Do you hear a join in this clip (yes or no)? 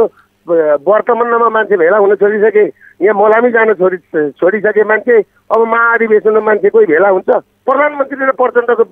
yes